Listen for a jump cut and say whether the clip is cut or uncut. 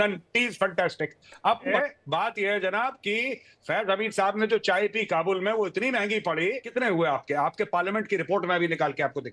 cut